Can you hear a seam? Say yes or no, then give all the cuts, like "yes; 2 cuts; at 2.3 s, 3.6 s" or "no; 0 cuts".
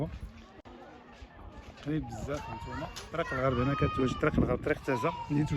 no; 0 cuts